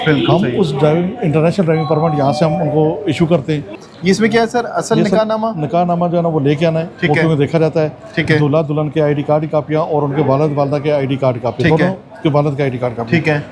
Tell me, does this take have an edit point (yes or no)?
yes